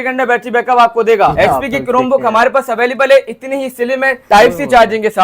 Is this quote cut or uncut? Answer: cut